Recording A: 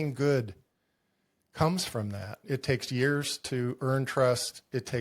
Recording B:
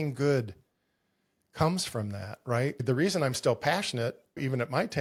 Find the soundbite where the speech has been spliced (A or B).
A